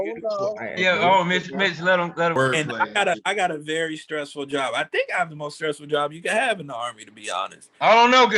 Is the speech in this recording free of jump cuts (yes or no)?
no